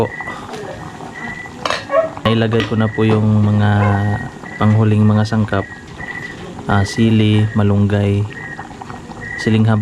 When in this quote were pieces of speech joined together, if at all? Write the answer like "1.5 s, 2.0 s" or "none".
2.2 s